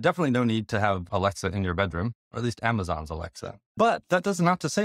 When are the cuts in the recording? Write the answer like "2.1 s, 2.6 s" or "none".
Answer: 1.0 s, 2.3 s, 3.8 s

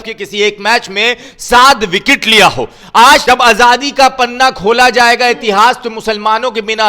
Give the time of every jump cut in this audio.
3.2 s

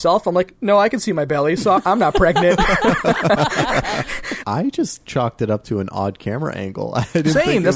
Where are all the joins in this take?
4.3 s

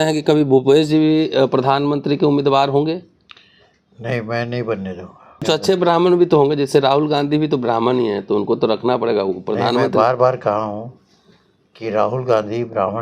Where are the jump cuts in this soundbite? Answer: 5.4 s

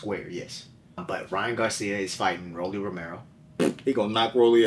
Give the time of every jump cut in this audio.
1.0 s

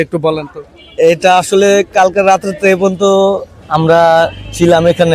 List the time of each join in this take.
none

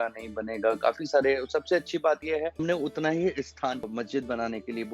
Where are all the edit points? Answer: 2.6 s, 3.9 s

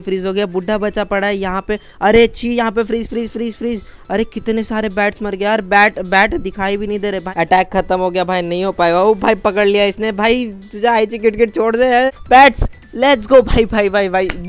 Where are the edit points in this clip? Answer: 12.1 s

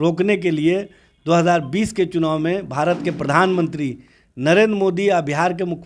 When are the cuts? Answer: none

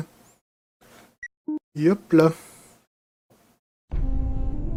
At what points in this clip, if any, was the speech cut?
none

